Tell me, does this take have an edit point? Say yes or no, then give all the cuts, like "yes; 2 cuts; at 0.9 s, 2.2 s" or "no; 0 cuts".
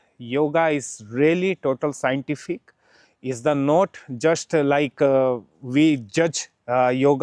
no; 0 cuts